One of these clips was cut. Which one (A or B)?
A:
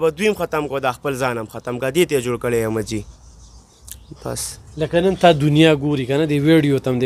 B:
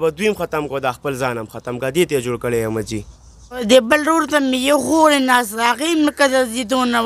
B